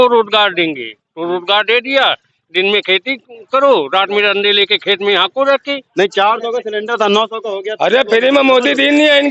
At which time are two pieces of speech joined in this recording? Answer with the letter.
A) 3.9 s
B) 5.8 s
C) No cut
B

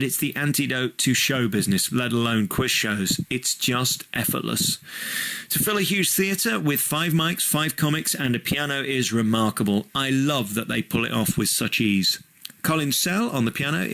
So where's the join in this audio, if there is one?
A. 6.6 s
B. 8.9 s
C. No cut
B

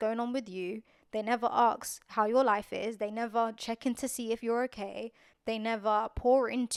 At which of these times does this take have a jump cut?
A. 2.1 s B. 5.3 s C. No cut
C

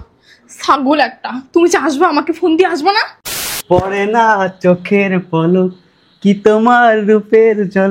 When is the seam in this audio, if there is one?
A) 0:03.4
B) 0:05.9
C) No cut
A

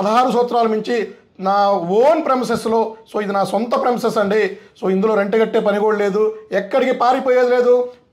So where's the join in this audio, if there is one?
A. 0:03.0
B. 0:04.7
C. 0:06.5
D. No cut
D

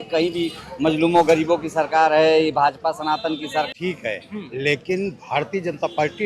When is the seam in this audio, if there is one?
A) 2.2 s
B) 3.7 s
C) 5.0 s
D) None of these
B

